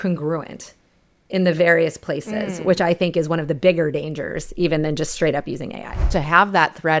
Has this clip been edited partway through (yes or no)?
yes